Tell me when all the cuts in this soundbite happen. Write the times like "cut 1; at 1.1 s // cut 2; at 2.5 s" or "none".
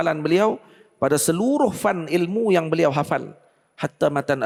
none

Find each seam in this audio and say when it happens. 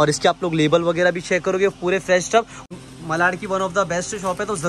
cut 1; at 2.7 s

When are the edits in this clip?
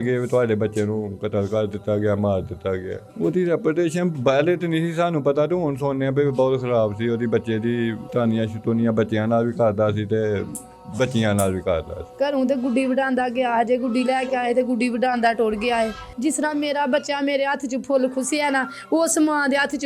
cut 1; at 3.0 s // cut 2; at 8.0 s // cut 3; at 12.0 s // cut 4; at 16.0 s

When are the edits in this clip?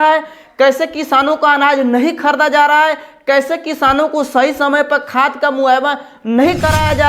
none

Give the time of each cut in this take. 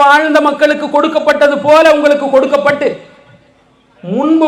none

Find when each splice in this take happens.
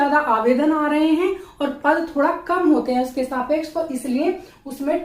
none

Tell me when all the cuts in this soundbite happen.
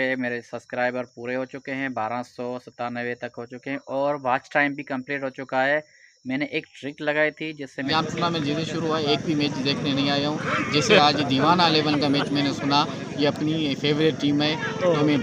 cut 1; at 7.9 s

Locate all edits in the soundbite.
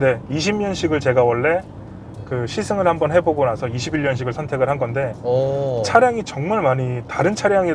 none

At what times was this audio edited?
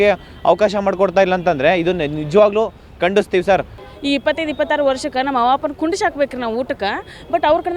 cut 1; at 3.8 s

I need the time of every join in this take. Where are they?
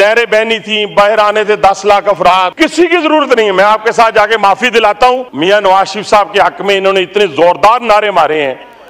cut 1; at 2.5 s // cut 2; at 5.3 s

